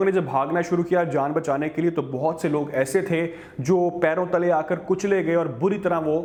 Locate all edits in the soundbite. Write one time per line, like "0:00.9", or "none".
none